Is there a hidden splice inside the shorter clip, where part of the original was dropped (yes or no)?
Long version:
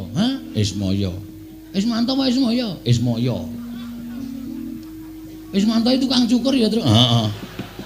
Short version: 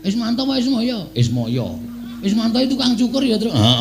yes